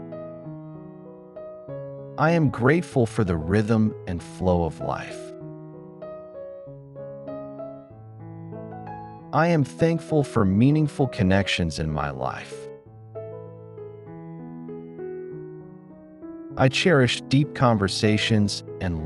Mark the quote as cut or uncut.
uncut